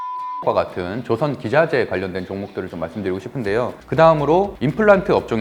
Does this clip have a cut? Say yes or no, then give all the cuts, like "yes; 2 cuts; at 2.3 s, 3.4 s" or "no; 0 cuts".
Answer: yes; 1 cut; at 3.8 s